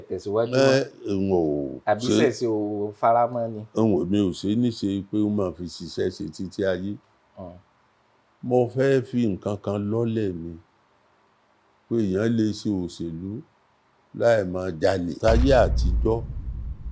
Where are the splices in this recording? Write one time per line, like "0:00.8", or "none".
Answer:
0:15.1